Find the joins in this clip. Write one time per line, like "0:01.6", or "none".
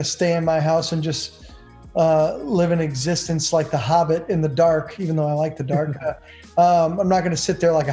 none